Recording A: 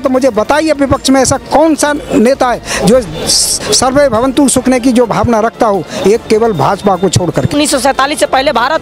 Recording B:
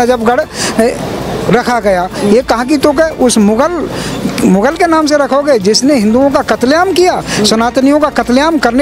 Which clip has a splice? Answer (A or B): A